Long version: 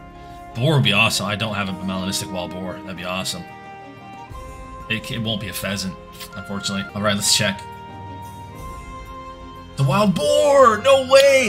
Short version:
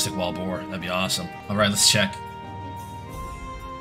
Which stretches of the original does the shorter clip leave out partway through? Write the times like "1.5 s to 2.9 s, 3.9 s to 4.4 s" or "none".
3.6 s to 6.9 s